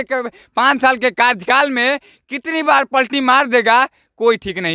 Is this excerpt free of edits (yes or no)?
yes